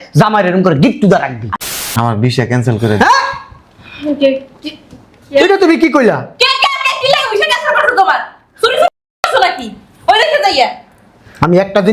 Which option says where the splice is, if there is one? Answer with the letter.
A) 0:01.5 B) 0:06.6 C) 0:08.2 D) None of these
A